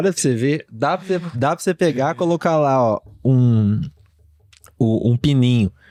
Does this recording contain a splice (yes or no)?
no